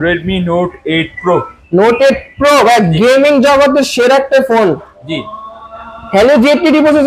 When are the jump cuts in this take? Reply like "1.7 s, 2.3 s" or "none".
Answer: none